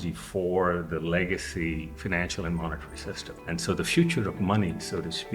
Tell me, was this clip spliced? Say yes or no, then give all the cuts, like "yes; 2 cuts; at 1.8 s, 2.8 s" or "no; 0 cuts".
no; 0 cuts